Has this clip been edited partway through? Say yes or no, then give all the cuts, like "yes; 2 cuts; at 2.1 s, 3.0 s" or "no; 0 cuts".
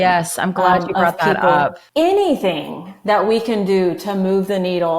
yes; 1 cut; at 1.8 s